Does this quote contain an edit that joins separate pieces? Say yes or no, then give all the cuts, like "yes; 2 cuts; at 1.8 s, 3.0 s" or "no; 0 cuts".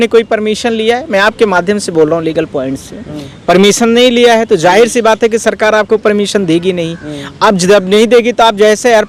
no; 0 cuts